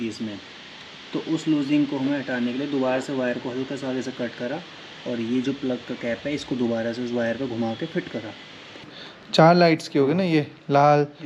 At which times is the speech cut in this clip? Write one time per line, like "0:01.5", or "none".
0:08.9